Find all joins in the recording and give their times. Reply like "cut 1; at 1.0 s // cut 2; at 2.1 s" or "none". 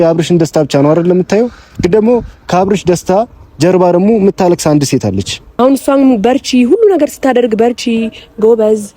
cut 1; at 5.4 s